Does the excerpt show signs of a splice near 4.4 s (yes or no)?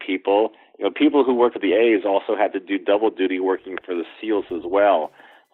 no